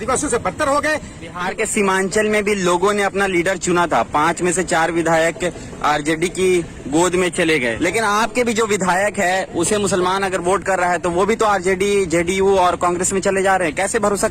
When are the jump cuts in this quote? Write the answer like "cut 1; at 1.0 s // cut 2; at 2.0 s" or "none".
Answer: cut 1; at 1.5 s // cut 2; at 7.7 s